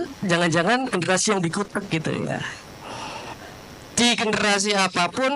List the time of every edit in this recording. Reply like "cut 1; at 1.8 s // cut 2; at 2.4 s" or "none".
cut 1; at 3.4 s